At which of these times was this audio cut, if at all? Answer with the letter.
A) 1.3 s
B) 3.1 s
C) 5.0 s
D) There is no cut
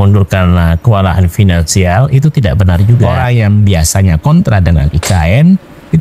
B